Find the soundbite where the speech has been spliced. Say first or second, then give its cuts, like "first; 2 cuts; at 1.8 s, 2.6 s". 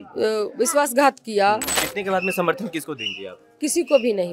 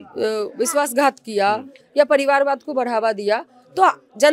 first; 1 cut; at 1.8 s